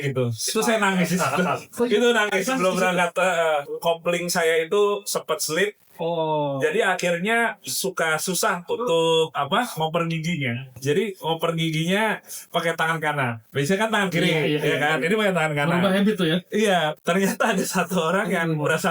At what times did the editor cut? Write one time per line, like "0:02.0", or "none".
0:03.7
0:10.8
0:16.9